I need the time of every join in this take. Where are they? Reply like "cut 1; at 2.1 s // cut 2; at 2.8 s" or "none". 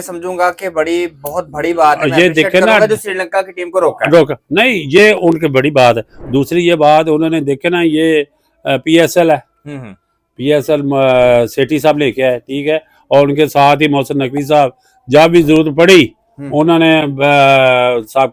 none